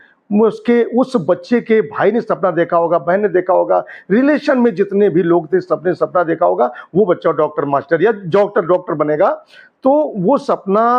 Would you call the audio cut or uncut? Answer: uncut